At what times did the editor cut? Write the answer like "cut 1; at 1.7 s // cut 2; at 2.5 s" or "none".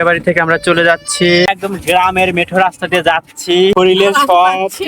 cut 1; at 1.5 s // cut 2; at 3.7 s